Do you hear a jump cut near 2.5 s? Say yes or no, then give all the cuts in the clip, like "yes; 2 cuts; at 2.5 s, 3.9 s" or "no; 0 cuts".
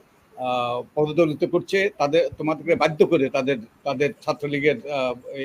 no; 0 cuts